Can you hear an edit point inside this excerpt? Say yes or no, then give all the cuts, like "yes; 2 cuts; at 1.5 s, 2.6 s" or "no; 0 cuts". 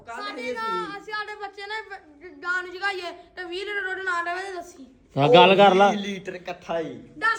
no; 0 cuts